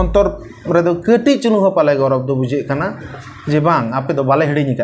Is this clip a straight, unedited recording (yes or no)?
yes